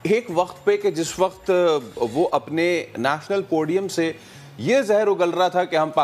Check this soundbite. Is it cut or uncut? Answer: uncut